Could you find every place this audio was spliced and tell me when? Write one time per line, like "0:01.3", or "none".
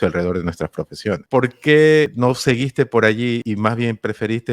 0:01.2
0:02.1
0:03.4